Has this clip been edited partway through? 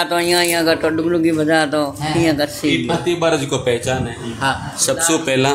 no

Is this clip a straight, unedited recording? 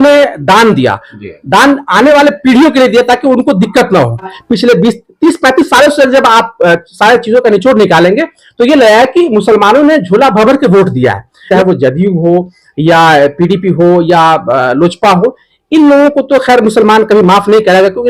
no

